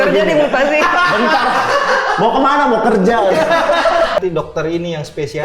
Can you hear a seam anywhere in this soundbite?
yes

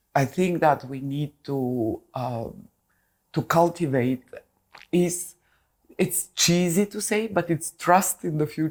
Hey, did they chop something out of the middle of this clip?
no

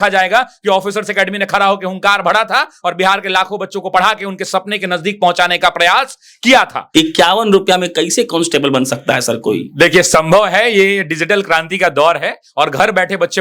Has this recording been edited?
yes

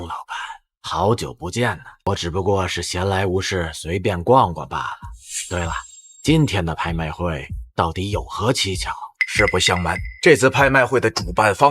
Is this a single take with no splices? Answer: no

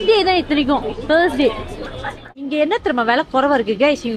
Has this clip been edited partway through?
yes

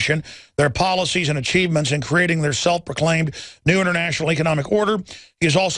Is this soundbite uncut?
yes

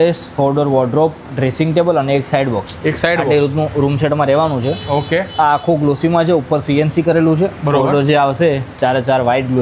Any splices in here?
no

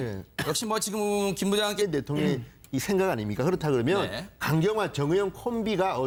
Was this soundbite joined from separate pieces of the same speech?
no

